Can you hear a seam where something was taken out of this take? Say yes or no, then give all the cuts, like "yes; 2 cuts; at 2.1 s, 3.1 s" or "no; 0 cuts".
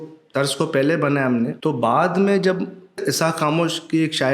yes; 2 cuts; at 1.6 s, 3.0 s